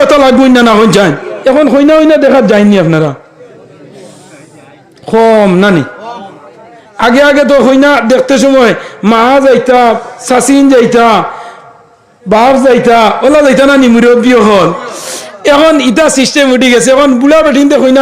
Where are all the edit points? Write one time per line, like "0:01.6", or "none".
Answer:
0:01.3